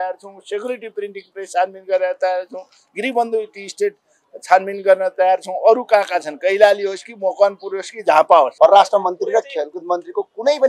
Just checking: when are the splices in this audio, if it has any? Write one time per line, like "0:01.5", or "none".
0:08.5